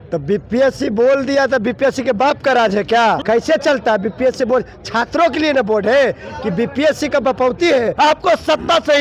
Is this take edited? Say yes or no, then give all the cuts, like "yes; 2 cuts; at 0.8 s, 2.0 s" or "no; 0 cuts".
yes; 2 cuts; at 3.2 s, 7.9 s